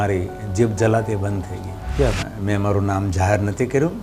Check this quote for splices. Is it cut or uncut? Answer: cut